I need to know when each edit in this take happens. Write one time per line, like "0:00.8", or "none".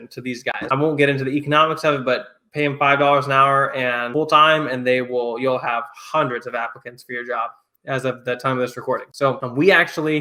none